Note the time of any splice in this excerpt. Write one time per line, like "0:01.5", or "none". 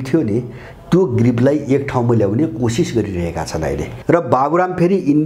0:03.9